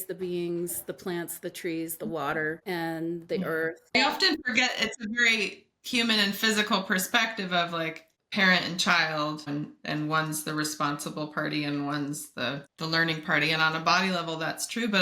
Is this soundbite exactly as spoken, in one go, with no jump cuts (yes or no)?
no